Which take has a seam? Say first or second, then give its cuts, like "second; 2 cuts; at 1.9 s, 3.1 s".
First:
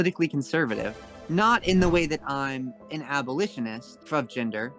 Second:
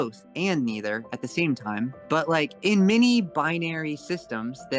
first; 1 cut; at 1.0 s